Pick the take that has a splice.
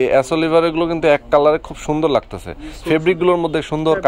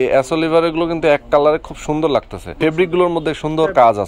second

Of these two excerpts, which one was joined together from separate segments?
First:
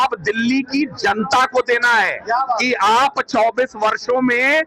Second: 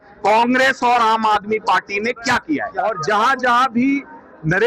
second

